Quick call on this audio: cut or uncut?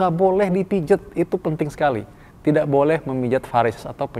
uncut